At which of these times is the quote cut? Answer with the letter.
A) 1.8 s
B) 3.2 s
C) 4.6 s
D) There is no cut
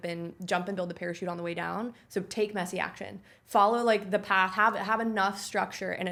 D